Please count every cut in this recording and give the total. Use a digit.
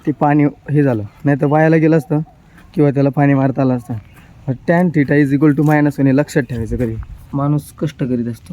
1